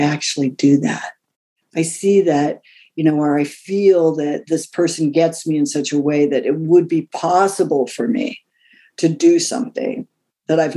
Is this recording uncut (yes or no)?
yes